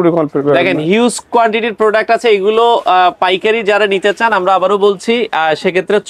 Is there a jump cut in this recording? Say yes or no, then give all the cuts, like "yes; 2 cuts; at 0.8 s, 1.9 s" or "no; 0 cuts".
no; 0 cuts